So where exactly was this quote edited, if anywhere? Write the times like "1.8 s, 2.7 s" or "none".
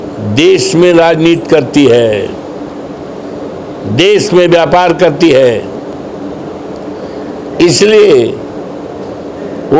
none